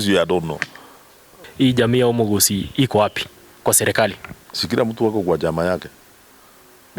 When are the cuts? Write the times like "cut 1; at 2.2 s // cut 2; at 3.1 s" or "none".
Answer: cut 1; at 1.4 s

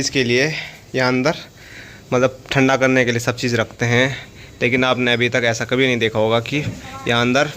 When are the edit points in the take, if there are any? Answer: none

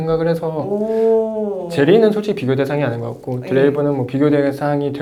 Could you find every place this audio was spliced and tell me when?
none

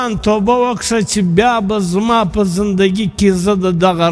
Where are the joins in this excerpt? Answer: none

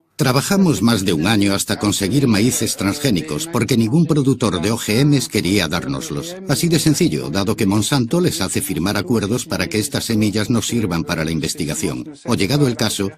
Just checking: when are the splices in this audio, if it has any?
cut 1; at 3.0 s

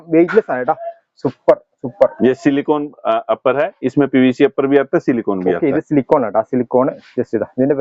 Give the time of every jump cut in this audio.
none

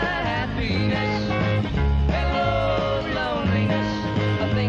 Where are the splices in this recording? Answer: none

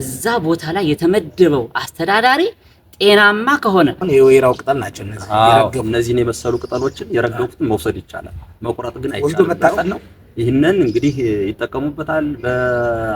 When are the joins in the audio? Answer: cut 1; at 4.0 s

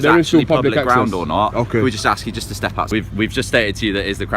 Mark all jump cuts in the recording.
cut 1; at 2.9 s

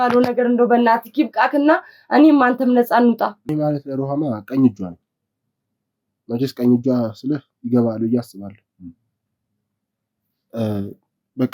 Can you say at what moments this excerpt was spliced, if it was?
cut 1; at 3.5 s

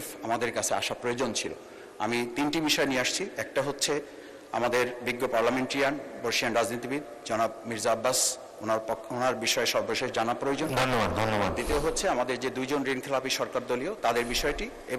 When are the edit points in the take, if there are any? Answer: none

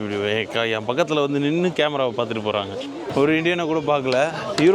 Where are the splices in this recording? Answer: cut 1; at 3.1 s

